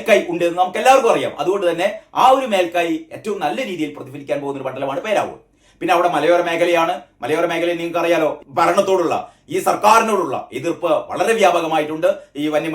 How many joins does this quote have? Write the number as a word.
one